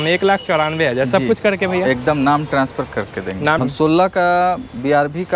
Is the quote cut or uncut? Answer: cut